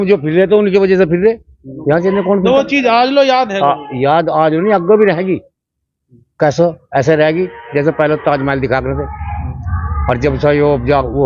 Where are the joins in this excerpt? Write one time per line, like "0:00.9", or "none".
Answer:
none